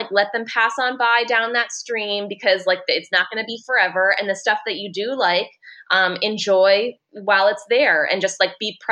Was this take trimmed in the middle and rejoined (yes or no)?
no